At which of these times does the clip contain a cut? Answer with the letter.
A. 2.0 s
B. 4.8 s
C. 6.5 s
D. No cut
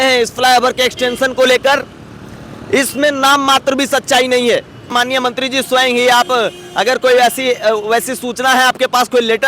B